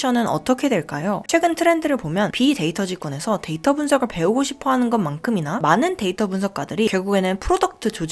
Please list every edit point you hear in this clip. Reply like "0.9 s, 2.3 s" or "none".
1.2 s